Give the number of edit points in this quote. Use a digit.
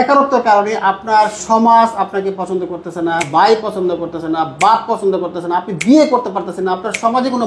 1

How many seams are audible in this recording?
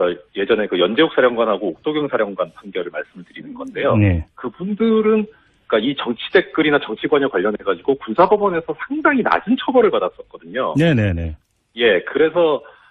1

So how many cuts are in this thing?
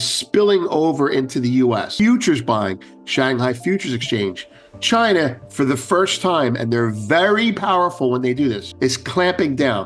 2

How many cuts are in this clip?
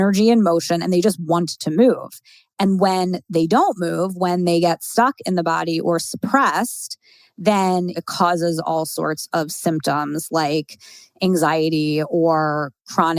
0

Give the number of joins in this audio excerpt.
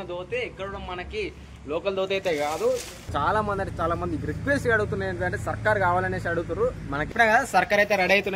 2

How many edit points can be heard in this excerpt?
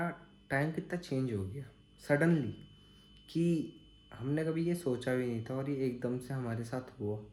0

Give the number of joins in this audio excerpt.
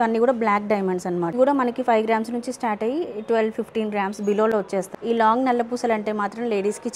2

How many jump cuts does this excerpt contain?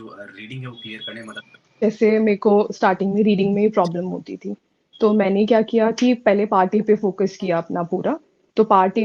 1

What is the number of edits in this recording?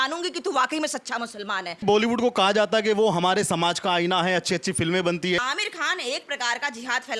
2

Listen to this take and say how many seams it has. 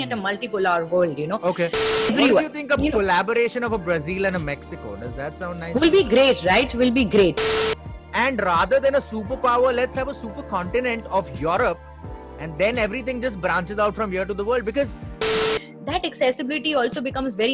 3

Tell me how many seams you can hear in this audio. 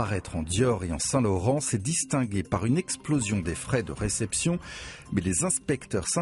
1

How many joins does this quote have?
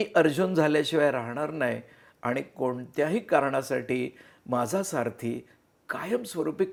0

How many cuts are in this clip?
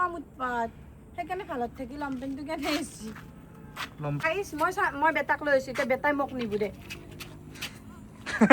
1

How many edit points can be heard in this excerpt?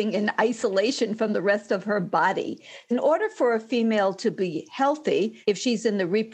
2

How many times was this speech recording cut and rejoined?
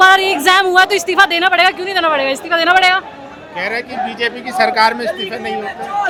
0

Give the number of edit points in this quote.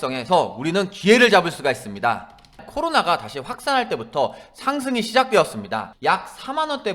2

